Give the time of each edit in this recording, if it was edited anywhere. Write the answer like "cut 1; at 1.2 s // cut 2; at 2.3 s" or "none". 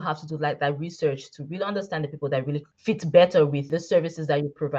cut 1; at 2.7 s // cut 2; at 3.6 s